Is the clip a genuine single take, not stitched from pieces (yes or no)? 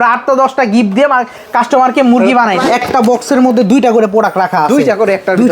no